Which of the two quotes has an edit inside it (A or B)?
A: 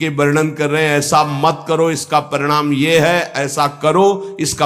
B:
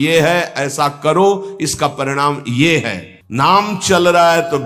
B